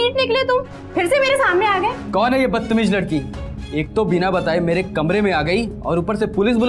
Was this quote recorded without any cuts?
no; 1 cut; at 2.0 s

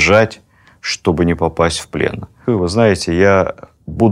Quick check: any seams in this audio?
yes; 1 cut; at 2.4 s

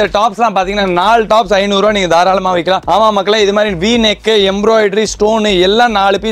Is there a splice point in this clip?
no; 0 cuts

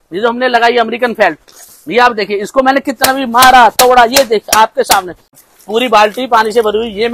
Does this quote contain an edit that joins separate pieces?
yes; 1 cut; at 5.4 s

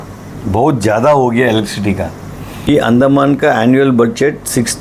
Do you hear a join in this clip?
yes; 1 cut; at 2.5 s

